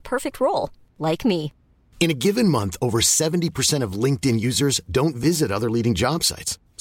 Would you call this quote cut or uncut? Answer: uncut